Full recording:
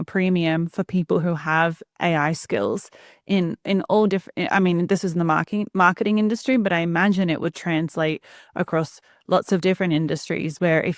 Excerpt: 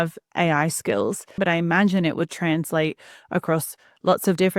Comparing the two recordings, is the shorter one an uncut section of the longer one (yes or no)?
no